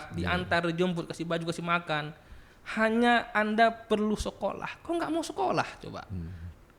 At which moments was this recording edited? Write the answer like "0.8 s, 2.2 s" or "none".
none